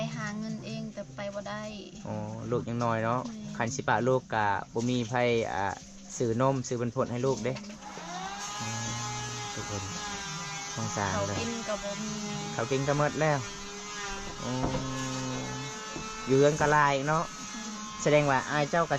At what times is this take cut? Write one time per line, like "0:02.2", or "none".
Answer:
none